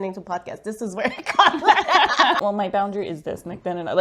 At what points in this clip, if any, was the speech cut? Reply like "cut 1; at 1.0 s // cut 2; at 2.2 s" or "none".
cut 1; at 2.4 s